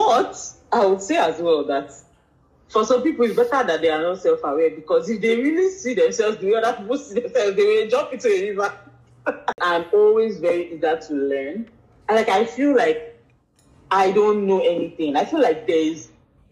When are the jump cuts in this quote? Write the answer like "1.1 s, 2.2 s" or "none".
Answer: 9.6 s